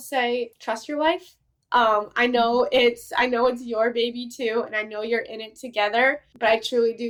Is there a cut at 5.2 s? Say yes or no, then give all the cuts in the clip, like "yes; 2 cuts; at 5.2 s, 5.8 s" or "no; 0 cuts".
no; 0 cuts